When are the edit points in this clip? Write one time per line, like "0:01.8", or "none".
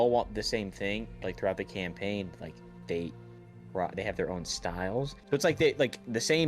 0:01.1
0:05.2